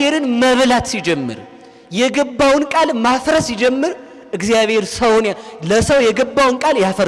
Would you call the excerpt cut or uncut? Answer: uncut